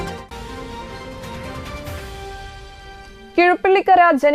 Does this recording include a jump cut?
no; 0 cuts

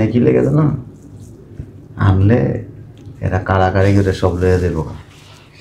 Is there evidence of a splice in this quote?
no; 0 cuts

